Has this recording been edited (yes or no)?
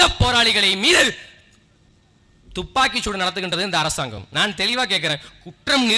no